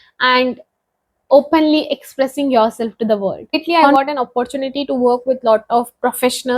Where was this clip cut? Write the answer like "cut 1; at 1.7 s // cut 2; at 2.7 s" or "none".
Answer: cut 1; at 3.8 s